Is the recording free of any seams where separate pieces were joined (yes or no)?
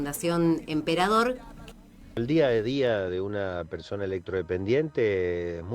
no